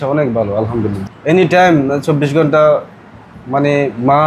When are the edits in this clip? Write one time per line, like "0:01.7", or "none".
0:01.0

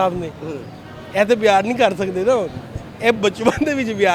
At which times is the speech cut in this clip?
none

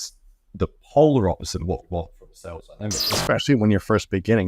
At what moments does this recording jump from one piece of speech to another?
0:03.1

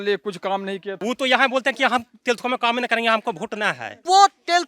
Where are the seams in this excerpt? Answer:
0:01.0

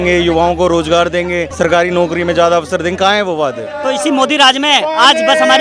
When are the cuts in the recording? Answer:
0:01.5
0:03.7

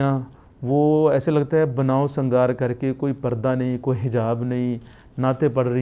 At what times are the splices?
none

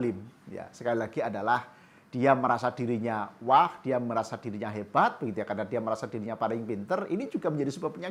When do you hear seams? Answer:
none

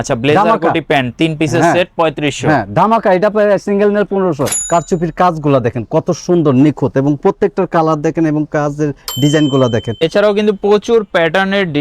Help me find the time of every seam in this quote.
0:04.6
0:10.0

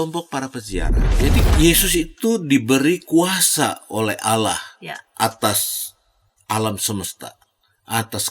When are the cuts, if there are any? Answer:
0:01.0

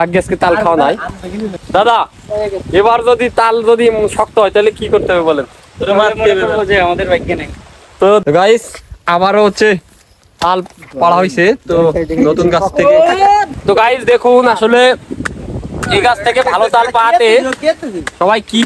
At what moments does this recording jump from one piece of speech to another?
0:01.1
0:08.2
0:13.5

